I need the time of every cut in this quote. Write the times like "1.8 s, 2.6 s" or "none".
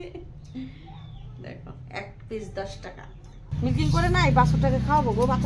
3.5 s